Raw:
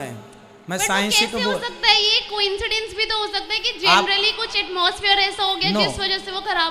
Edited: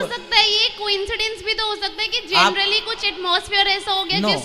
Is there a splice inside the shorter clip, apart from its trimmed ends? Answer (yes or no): no